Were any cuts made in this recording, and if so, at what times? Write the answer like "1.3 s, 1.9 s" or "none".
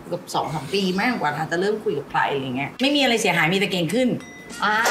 2.7 s